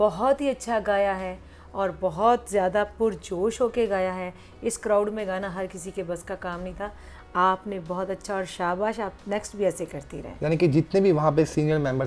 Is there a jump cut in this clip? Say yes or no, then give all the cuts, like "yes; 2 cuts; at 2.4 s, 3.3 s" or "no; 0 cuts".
no; 0 cuts